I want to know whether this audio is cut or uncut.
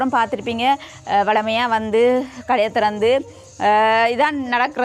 uncut